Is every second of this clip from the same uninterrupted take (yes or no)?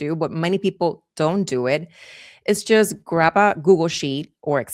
yes